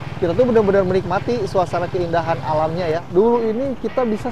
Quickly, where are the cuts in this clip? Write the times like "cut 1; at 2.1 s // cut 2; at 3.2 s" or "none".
cut 1; at 3.0 s